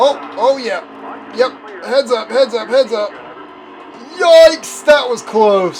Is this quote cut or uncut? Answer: uncut